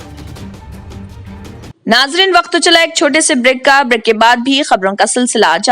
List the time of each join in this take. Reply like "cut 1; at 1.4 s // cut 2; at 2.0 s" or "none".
cut 1; at 1.6 s